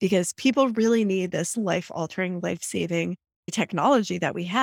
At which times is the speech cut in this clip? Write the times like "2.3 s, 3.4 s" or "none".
3.5 s